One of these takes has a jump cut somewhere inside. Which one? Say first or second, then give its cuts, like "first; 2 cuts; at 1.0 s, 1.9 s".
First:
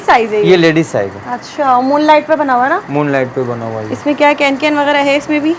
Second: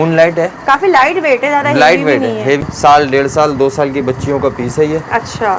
second; 1 cut; at 2.7 s